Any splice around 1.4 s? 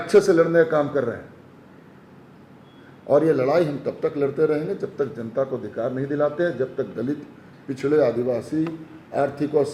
no; 0 cuts

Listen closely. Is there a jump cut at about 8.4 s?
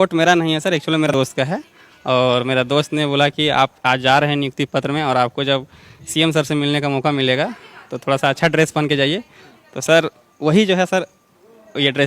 no; 1 cut; at 1.1 s

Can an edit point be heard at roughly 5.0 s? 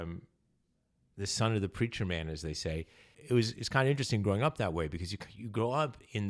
no; 1 cut; at 3.2 s

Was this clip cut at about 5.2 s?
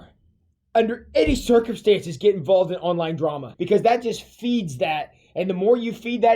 no; 1 cut; at 3.5 s

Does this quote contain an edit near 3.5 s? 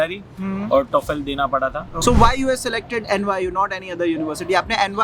no; 1 cut; at 1.9 s

